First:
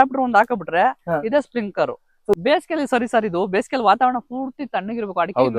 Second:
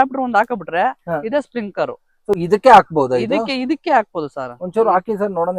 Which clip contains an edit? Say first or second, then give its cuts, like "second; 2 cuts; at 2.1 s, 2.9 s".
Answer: first; 1 cut; at 2.4 s